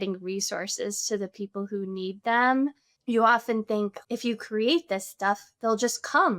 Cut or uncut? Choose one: cut